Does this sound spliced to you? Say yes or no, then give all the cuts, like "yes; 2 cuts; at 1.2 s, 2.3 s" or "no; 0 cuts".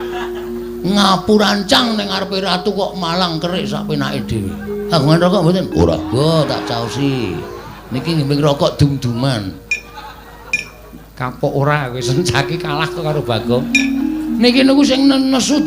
no; 0 cuts